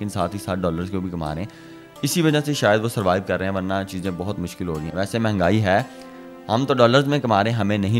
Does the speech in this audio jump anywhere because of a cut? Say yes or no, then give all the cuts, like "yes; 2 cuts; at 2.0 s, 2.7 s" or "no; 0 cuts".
no; 0 cuts